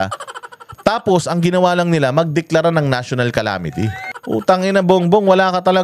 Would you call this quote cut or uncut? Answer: cut